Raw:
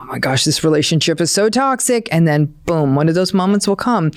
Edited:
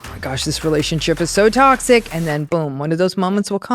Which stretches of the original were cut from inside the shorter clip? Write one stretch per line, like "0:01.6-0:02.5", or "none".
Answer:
0:02.3-0:02.5